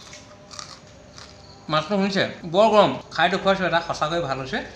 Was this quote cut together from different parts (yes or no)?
yes